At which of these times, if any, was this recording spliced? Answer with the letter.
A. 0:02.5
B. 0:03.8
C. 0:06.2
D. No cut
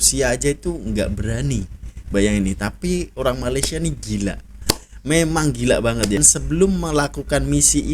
C